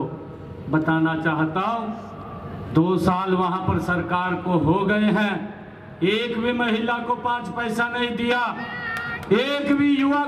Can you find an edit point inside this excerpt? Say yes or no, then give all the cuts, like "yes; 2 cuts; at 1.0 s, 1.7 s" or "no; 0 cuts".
no; 0 cuts